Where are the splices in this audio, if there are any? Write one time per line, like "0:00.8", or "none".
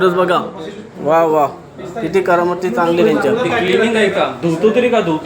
0:03.7